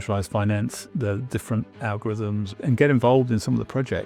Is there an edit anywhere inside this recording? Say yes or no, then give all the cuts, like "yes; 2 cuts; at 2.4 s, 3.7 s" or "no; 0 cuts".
yes; 1 cut; at 2.5 s